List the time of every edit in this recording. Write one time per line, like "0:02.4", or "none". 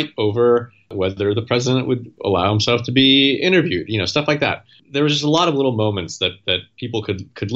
0:00.9
0:02.1
0:04.8